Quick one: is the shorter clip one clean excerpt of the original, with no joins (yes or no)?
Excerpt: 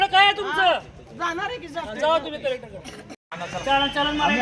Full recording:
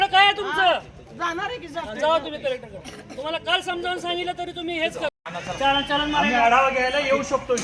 no